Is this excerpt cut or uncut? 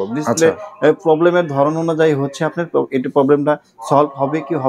uncut